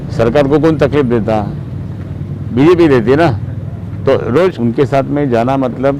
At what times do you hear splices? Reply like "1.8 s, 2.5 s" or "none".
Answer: 4.6 s